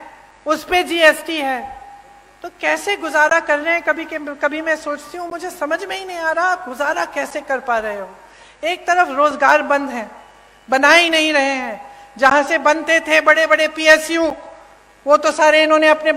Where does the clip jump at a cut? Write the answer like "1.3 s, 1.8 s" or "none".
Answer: none